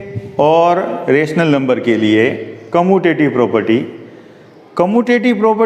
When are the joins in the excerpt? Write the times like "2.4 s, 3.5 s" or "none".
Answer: none